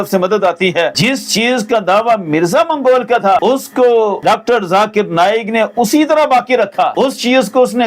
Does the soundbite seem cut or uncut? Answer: cut